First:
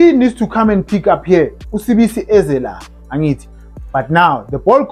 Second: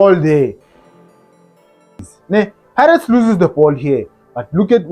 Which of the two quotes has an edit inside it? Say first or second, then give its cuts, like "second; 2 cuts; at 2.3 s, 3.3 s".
second; 1 cut; at 2.0 s